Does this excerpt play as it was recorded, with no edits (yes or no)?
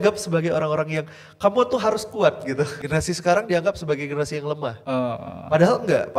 no